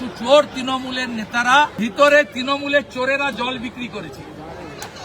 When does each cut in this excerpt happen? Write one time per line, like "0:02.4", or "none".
0:01.8